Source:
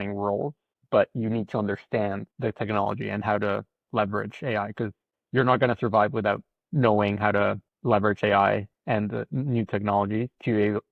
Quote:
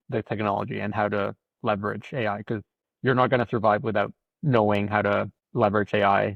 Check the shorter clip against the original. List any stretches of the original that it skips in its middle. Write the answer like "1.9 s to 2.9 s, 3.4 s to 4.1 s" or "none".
none